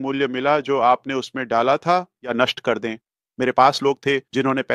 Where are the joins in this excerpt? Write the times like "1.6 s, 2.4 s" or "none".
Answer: 2.3 s